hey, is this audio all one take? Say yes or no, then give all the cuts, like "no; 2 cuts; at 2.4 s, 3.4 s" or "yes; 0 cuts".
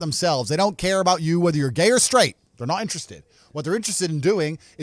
yes; 0 cuts